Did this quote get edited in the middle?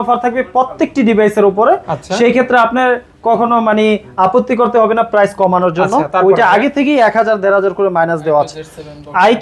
no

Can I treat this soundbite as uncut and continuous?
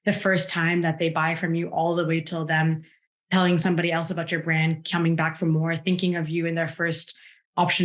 yes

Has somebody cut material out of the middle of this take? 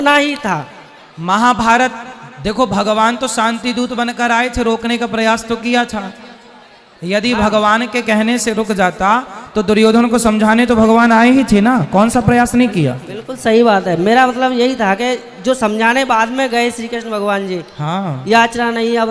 no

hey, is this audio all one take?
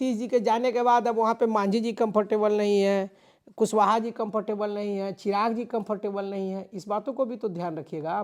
yes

